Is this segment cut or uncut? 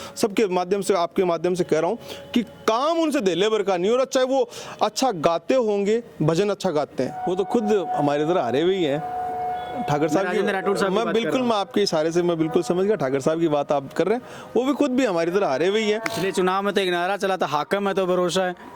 cut